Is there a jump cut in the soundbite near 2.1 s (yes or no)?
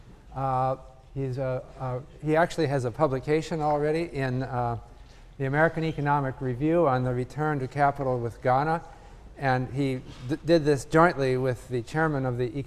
no